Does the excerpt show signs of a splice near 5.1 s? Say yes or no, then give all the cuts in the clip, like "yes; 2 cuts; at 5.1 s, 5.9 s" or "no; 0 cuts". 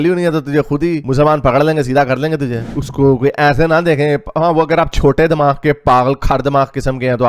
no; 1 cut; at 2.6 s